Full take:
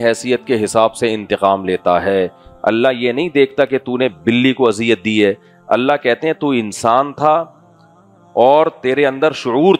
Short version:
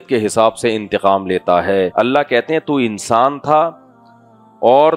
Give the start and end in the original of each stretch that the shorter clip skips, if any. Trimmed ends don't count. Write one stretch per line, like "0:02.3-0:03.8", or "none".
0:02.3-0:05.6